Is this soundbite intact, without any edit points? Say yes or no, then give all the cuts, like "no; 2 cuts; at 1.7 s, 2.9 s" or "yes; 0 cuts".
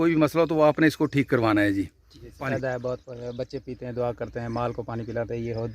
no; 1 cut; at 2.5 s